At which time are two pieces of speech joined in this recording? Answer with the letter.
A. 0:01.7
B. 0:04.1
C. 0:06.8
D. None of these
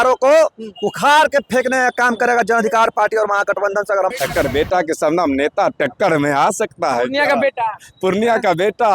B